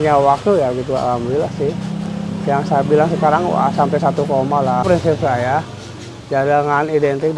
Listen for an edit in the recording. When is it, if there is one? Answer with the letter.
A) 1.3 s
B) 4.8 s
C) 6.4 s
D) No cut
B